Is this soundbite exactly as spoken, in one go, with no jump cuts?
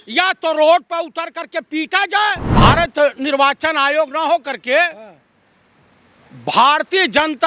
no; 1 cut; at 2.4 s

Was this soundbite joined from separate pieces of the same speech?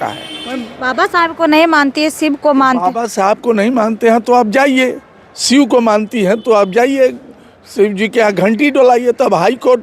no; 0 cuts

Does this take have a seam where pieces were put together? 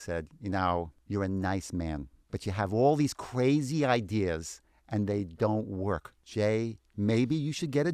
yes; 4 cuts; at 1.0 s, 2.2 s, 6.2 s, 6.9 s

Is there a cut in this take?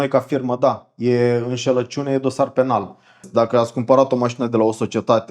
yes; 1 cut; at 3.2 s

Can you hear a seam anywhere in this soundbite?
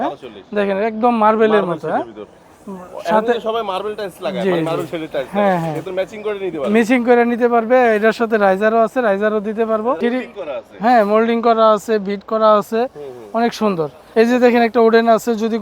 yes; 2 cuts; at 10.0 s, 14.0 s

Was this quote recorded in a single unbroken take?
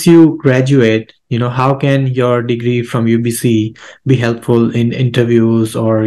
yes; 0 cuts

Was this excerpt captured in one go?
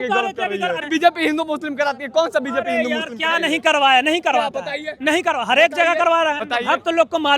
no; 2 cuts; at 0.8 s, 6.4 s

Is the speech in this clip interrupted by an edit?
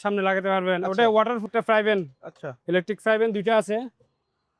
yes; 1 cut; at 1.5 s

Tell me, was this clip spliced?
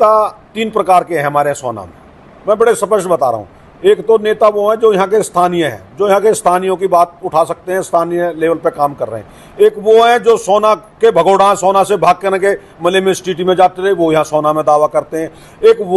no; 0 cuts

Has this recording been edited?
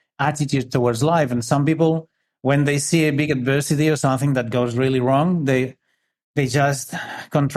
no; 0 cuts

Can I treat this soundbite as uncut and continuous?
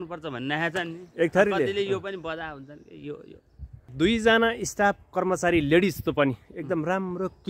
no; 1 cut; at 3.9 s

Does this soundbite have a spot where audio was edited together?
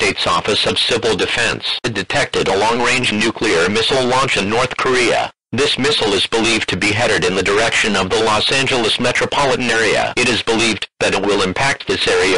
yes; 1 cut; at 1.8 s

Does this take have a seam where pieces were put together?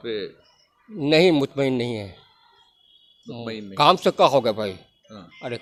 no; 0 cuts

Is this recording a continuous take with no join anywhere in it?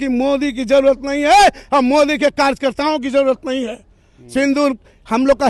yes; 0 cuts

